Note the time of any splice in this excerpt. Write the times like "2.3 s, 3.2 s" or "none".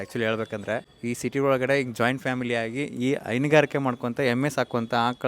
0.9 s